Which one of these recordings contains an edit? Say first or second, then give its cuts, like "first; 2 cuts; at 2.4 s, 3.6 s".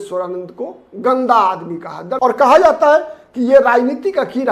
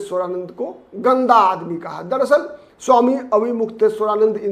first; 1 cut; at 2.1 s